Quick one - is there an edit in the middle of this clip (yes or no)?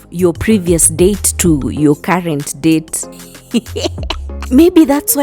no